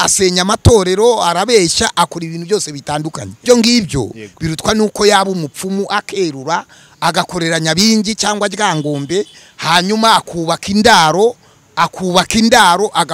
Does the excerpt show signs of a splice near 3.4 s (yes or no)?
yes